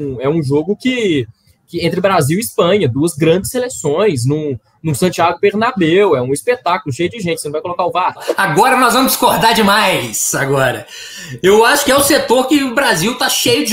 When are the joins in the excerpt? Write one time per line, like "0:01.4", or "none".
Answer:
0:08.3